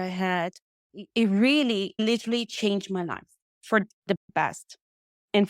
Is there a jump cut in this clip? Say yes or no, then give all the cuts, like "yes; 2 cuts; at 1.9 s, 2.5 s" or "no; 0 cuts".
yes; 1 cut; at 1.0 s